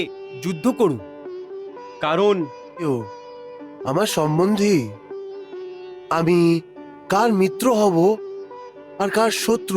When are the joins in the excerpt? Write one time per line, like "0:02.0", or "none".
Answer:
0:02.9